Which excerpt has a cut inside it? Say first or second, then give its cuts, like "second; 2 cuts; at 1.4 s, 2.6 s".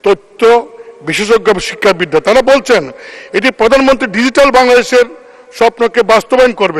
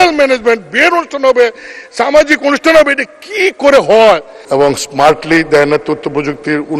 second; 1 cut; at 4.3 s